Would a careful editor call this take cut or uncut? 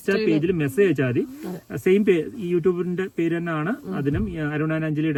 uncut